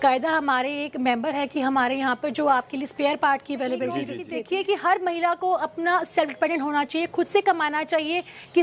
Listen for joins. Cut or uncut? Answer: cut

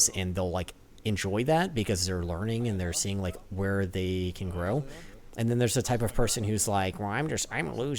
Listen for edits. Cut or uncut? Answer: uncut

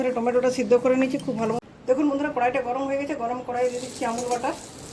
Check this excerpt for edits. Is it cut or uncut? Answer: cut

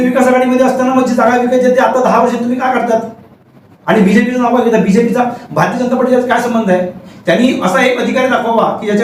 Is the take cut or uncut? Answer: uncut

